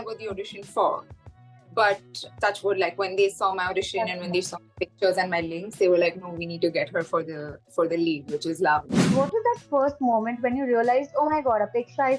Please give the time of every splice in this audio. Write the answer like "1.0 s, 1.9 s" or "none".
9.1 s